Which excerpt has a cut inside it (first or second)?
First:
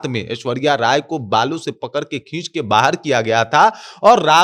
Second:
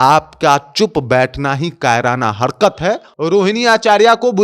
second